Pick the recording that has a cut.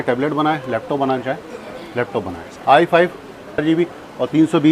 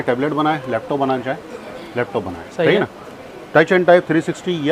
first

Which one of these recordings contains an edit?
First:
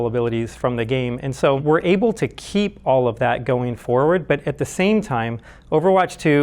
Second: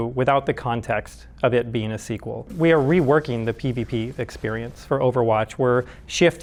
first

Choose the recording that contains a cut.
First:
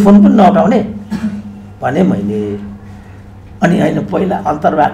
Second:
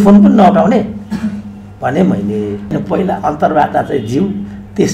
second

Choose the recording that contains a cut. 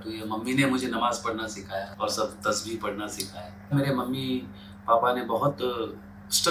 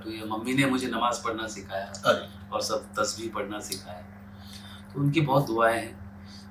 first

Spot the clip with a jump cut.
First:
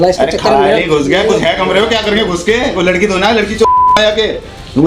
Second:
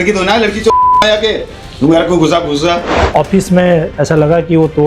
second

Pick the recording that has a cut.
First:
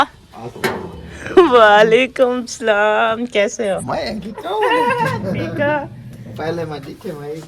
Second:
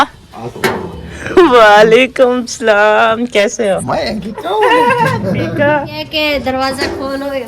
second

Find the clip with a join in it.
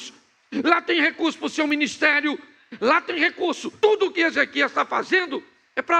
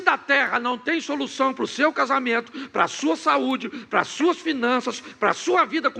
first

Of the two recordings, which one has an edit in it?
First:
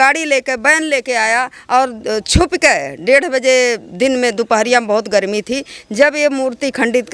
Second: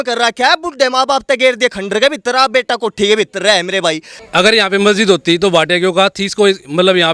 second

